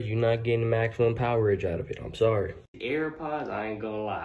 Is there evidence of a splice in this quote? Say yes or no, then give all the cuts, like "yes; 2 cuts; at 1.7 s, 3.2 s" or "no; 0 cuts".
yes; 1 cut; at 2.8 s